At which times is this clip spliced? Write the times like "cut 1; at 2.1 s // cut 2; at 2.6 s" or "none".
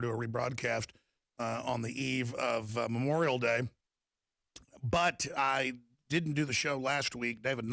cut 1; at 5.9 s